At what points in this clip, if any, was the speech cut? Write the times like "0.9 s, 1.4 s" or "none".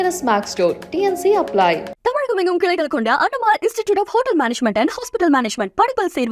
none